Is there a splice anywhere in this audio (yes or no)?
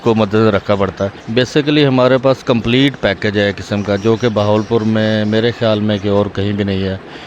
yes